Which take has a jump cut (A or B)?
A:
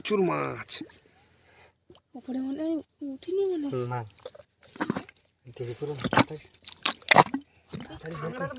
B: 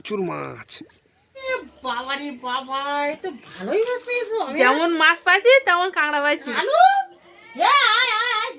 B